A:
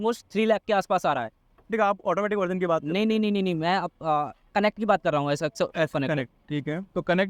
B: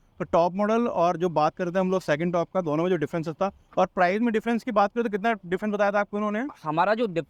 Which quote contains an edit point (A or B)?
A